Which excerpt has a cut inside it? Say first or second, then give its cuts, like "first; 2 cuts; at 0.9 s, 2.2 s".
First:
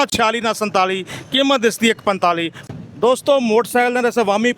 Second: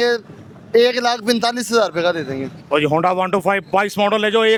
first; 1 cut; at 2.7 s